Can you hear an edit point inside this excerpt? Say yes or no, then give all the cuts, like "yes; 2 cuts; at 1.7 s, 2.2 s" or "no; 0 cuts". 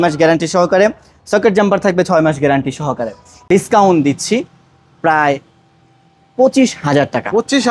yes; 1 cut; at 3.3 s